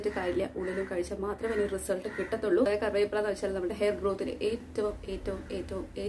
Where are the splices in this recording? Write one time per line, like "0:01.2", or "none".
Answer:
0:02.7